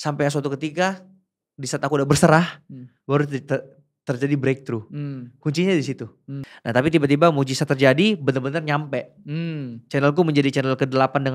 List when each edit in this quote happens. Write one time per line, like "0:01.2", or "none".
0:06.4